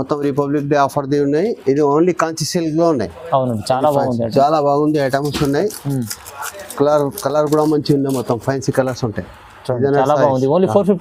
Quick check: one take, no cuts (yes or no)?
yes